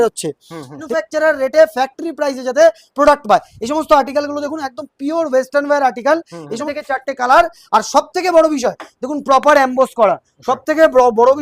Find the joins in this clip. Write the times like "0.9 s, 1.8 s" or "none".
0.8 s, 6.6 s